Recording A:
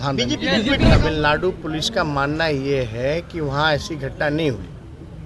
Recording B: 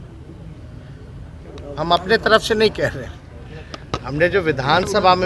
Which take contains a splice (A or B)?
A